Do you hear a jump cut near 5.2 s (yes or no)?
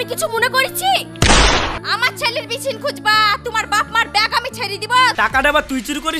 yes